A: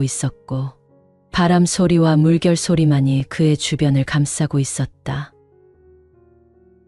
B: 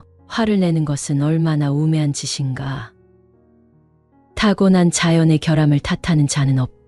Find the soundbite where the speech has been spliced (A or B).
A